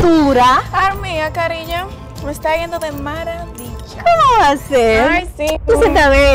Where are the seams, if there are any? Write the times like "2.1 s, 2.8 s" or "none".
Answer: none